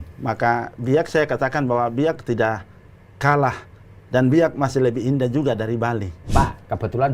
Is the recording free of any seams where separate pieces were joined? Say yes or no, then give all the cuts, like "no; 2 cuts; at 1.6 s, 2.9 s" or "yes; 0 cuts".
no; 1 cut; at 6.2 s